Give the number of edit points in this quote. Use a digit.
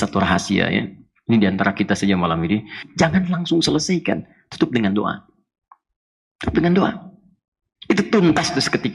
1